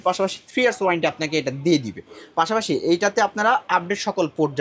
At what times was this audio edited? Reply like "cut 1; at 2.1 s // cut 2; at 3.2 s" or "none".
none